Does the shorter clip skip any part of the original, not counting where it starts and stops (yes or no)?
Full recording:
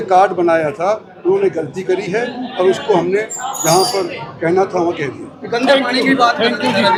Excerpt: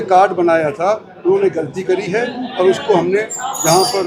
no